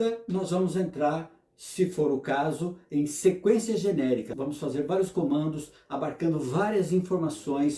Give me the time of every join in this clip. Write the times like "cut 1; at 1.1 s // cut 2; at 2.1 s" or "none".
cut 1; at 4.4 s